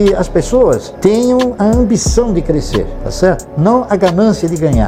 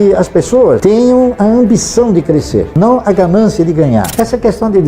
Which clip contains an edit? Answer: second; 3 cuts; at 0.8 s, 2.7 s, 4.1 s

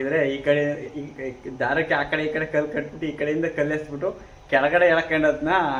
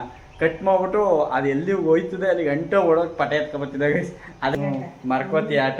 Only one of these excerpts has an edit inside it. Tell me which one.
second; 1 cut; at 4.5 s

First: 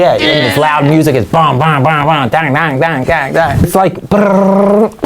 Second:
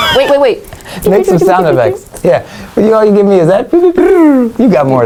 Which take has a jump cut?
first; 1 cut; at 3.7 s

